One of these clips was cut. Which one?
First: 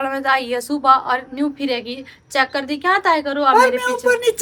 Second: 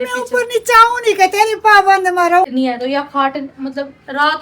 second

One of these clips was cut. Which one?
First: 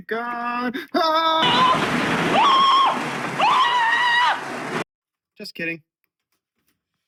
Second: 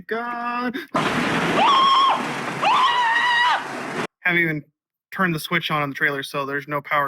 second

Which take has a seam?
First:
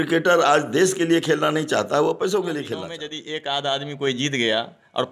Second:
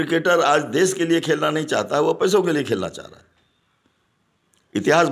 first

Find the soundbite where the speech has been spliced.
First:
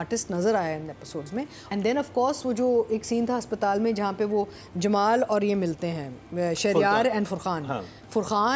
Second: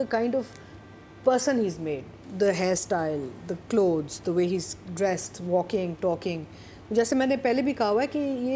first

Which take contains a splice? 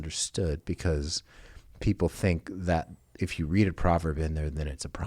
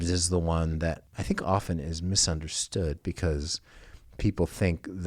second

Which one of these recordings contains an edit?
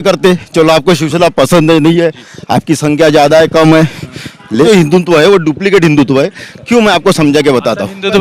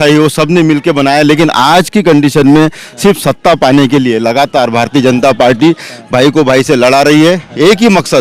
first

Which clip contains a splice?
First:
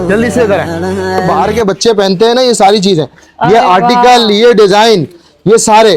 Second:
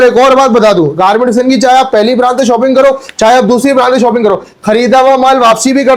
first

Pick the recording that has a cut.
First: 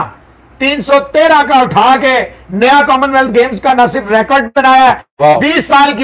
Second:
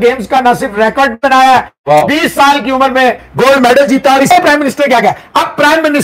second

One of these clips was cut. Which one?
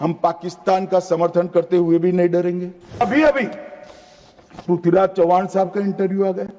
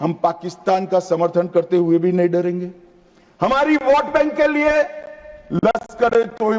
first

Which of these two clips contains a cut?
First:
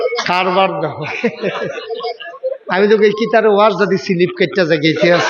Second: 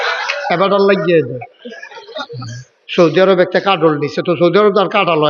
second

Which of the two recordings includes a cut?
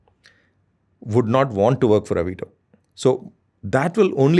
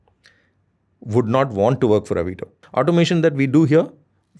second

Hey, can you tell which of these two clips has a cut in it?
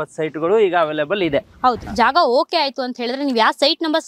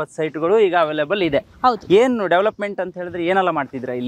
first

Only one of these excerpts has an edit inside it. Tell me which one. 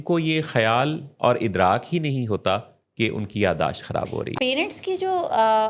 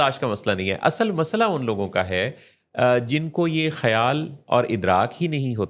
first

